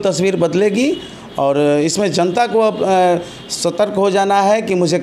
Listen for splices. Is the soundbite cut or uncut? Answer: uncut